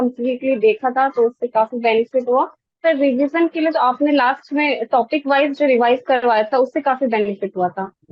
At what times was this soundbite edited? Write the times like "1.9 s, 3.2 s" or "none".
2.6 s